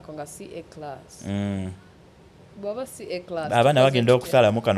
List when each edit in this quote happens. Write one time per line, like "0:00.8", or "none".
none